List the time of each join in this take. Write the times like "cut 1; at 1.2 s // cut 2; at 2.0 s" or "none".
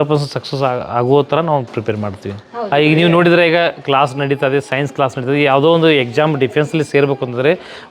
cut 1; at 2.7 s